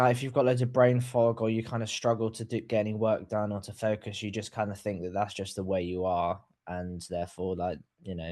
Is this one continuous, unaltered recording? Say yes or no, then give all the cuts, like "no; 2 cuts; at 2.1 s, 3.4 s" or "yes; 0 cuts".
yes; 0 cuts